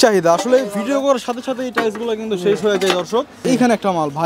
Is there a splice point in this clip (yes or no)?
yes